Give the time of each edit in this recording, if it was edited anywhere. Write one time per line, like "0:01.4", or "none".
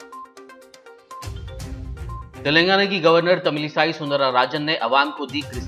0:02.0

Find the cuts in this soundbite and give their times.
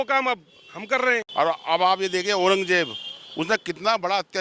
0:01.3

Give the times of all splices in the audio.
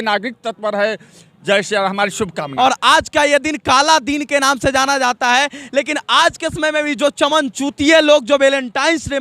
0:02.4

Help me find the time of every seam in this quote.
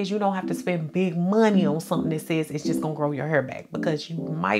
none

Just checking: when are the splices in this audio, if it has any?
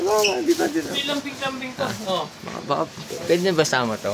none

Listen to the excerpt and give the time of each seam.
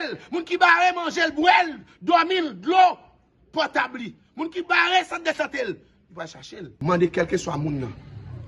0:06.6

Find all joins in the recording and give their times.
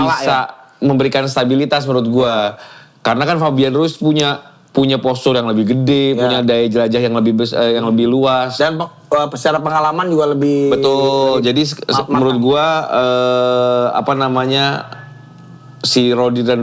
none

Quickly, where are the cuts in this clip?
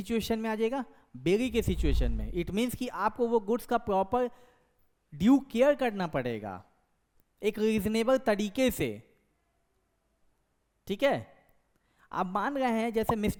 none

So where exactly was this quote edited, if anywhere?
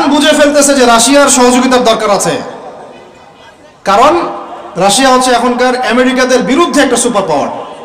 none

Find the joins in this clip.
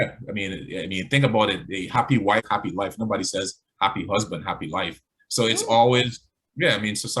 0:02.4

